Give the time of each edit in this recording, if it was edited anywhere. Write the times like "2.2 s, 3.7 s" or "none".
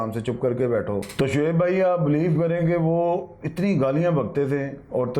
1.1 s